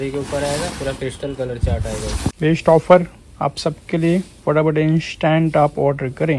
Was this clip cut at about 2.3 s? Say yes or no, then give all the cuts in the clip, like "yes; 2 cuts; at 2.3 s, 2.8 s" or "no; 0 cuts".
yes; 1 cut; at 2.3 s